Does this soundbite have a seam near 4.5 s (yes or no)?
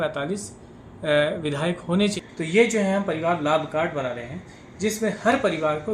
no